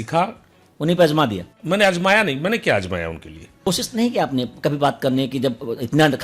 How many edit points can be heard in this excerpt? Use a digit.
2